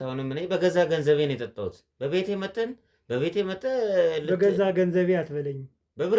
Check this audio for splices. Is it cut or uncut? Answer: uncut